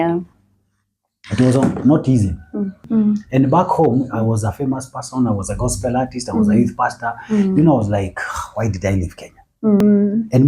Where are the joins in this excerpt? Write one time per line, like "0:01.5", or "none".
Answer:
0:02.8
0:09.8